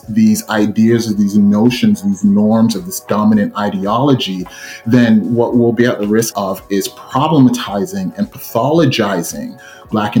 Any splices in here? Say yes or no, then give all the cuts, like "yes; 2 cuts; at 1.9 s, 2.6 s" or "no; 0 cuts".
no; 0 cuts